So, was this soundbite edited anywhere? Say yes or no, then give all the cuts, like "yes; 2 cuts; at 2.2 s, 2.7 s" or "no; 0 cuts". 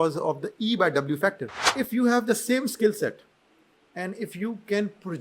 yes; 1 cut; at 1.7 s